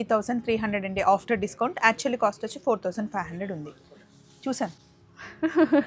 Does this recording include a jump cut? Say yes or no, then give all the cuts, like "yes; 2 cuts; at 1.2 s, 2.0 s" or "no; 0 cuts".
no; 0 cuts